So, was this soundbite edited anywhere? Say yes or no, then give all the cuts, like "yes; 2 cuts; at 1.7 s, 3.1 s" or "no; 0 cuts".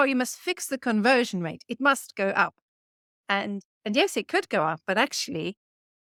no; 0 cuts